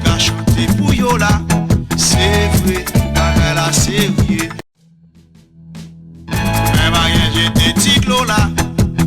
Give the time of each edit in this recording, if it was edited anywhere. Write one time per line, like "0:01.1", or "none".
0:08.2